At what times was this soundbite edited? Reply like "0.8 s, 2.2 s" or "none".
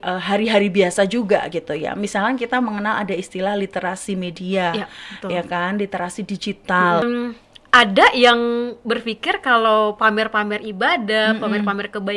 7.0 s

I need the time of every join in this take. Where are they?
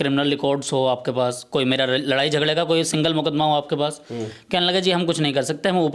none

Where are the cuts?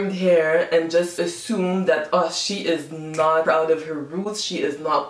3.4 s

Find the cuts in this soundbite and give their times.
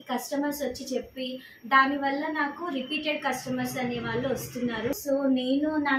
4.9 s

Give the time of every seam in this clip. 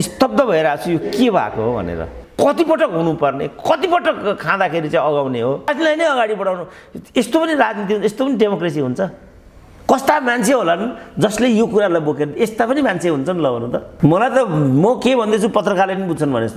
2.2 s, 5.7 s, 13.9 s

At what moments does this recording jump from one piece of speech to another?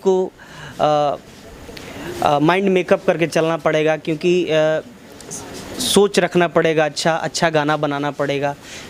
none

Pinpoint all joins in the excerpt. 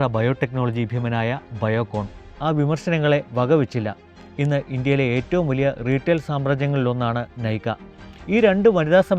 2.4 s

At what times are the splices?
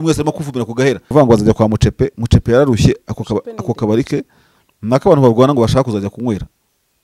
1.1 s

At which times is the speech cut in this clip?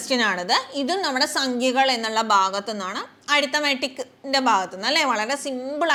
none

